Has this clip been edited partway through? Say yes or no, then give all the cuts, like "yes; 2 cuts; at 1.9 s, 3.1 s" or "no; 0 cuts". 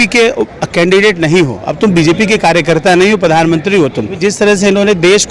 yes; 1 cut; at 4.1 s